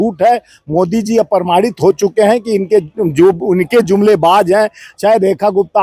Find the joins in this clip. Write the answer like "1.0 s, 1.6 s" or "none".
none